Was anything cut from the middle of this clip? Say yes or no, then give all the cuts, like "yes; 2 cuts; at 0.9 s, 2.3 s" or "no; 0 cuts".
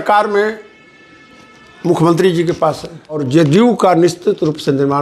yes; 1 cut; at 3.2 s